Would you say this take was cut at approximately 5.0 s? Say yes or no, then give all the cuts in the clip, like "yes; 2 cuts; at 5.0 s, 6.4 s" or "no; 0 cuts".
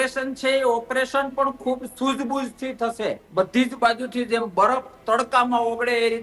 no; 1 cut; at 3.2 s